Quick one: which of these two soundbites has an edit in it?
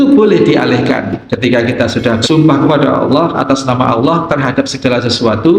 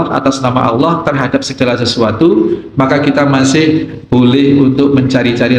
first; 2 cuts; at 1.2 s, 2.2 s

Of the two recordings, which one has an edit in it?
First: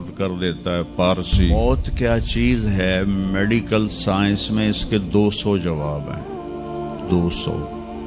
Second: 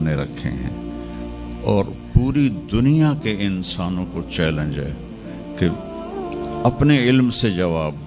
first; 1 cut; at 1.4 s

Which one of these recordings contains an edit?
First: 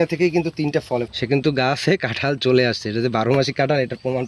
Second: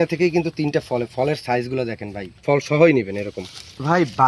first; 1 cut; at 1.0 s

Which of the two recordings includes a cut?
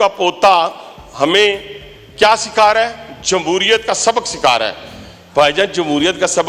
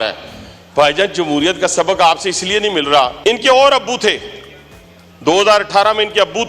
second; 1 cut; at 3.1 s

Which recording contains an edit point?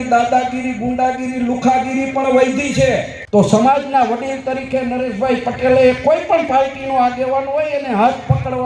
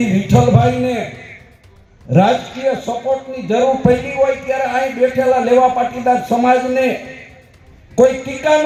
first; 1 cut; at 3.1 s

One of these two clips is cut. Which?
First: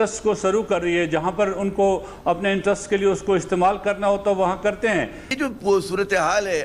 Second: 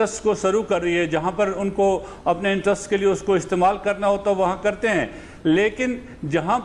first; 1 cut; at 5.3 s

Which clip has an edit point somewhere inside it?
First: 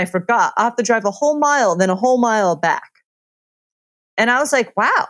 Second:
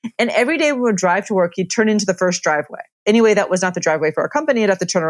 second; 1 cut; at 2.9 s

